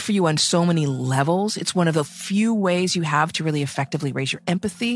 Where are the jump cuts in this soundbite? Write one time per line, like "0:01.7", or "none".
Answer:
none